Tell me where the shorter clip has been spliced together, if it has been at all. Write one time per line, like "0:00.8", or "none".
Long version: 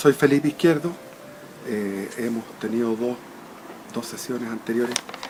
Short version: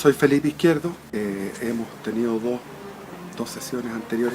0:01.0

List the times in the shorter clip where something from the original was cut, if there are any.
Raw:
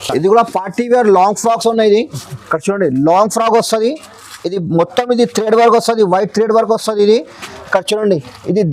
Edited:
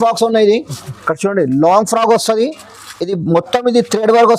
none

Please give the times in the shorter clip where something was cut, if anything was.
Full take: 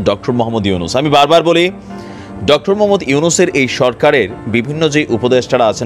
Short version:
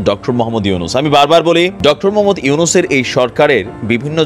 0:01.7

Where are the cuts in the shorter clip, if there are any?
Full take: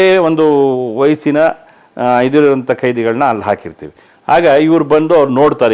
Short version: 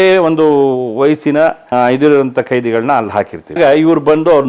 0:01.6
0:03.6

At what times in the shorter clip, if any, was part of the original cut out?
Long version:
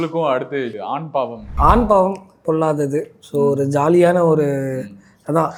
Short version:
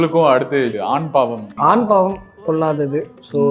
none

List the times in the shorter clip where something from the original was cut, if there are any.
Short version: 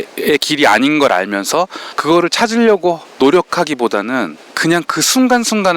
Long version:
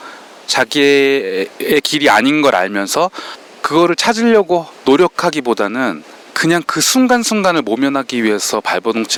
0:01.9
0:04.4

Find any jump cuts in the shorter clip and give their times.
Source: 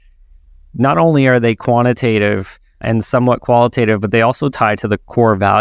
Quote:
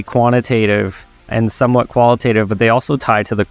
none

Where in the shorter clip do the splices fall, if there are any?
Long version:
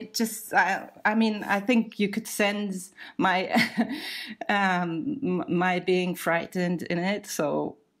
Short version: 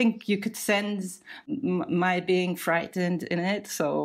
0:01.4

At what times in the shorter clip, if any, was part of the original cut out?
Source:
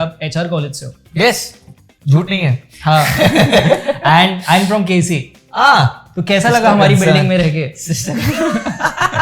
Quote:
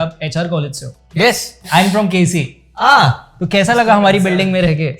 0:01.6

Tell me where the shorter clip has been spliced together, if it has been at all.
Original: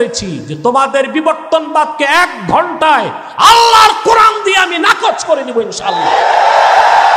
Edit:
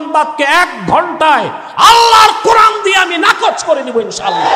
none

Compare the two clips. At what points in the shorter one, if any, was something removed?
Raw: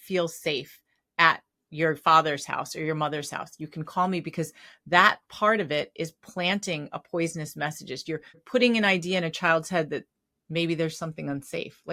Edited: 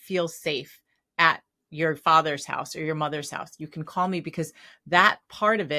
none

